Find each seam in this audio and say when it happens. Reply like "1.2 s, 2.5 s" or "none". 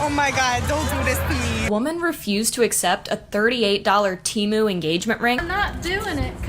1.7 s, 5.4 s